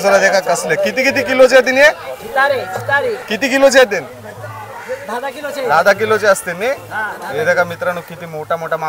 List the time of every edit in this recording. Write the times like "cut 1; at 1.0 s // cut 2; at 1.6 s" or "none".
none